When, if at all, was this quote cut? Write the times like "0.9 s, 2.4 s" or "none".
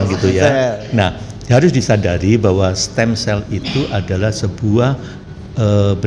none